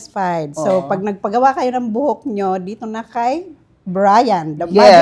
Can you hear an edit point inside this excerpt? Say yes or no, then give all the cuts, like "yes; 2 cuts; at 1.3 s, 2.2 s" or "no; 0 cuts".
no; 0 cuts